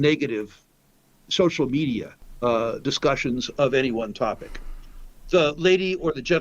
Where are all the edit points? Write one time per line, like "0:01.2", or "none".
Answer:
0:02.2